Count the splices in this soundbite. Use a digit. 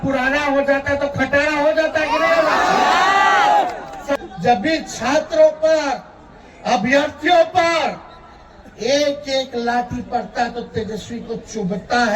1